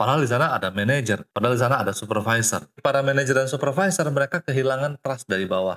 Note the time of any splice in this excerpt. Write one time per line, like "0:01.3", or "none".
0:02.8

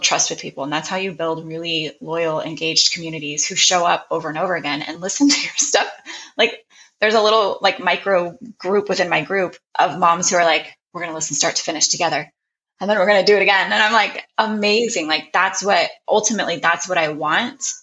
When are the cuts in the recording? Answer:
none

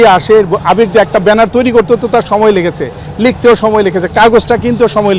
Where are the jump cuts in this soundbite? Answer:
none

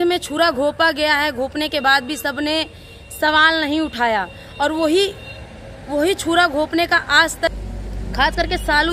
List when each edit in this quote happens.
0:07.5

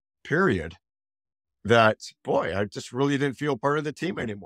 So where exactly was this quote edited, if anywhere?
none

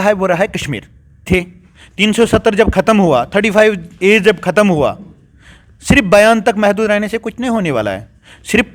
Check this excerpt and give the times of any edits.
0:01.3

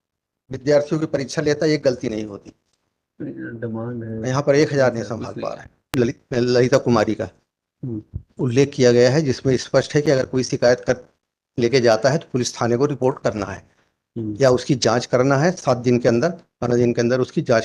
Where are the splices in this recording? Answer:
0:05.9

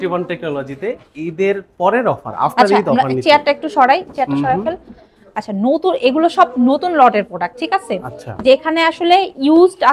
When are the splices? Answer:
none

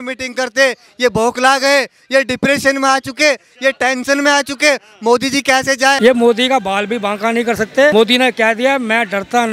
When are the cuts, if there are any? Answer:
0:06.0
0:07.9

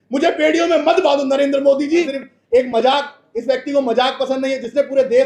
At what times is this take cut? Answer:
0:02.2

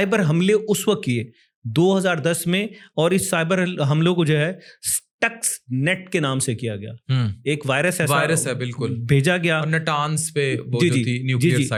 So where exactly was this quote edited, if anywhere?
none

